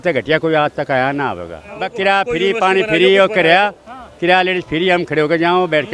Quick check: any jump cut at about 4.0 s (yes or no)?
no